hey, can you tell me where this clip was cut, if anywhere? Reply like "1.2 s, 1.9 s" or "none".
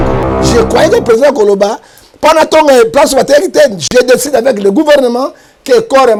none

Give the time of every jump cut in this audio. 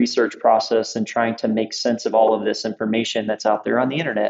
none

